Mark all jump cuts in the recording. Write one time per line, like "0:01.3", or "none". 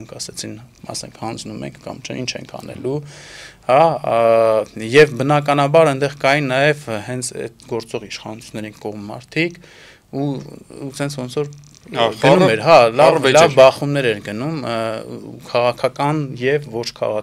none